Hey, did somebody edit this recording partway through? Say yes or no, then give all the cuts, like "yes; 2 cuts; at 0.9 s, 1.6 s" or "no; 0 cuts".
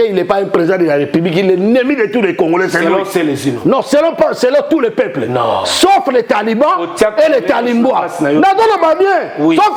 no; 0 cuts